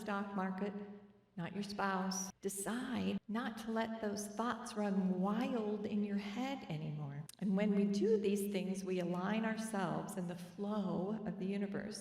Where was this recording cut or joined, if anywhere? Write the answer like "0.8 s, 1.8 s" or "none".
2.3 s, 3.2 s